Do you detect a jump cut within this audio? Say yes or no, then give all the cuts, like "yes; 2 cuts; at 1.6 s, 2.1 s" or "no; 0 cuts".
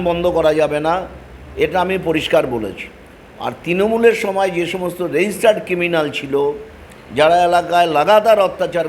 no; 0 cuts